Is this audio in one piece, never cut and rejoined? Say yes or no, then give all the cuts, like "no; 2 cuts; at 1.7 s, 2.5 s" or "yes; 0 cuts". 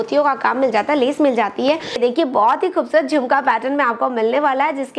no; 1 cut; at 2.0 s